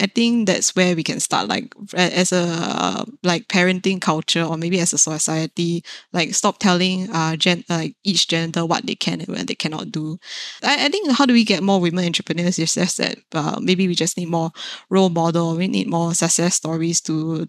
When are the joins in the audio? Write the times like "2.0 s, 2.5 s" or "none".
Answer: 10.5 s